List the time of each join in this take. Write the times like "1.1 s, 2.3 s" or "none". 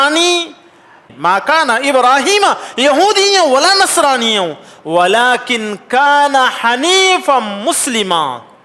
1.0 s